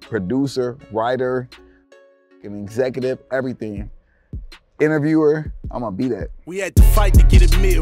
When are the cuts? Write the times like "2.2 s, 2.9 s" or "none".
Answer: 6.4 s